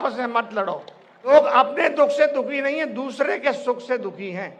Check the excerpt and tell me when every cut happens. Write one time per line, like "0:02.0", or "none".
0:01.3